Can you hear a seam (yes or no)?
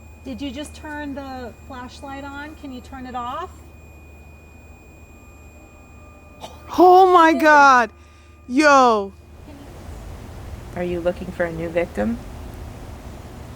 yes